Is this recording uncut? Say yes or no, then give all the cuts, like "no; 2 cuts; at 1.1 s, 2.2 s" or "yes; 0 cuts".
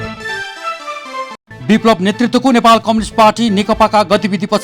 yes; 0 cuts